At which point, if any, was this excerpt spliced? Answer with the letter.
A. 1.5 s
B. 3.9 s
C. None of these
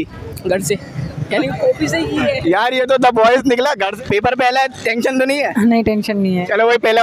B